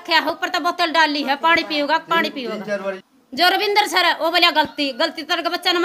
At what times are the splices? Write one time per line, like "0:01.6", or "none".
0:03.0